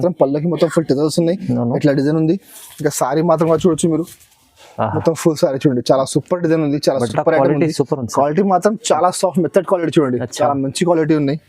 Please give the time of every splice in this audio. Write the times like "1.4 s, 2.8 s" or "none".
none

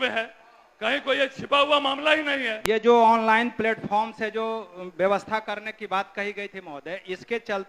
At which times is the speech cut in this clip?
2.5 s

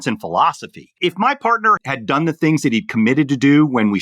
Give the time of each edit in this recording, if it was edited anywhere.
1.8 s

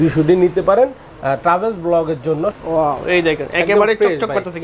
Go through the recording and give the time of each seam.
2.6 s

